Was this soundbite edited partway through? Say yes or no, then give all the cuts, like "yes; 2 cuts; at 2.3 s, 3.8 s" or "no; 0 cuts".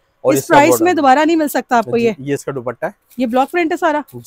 no; 0 cuts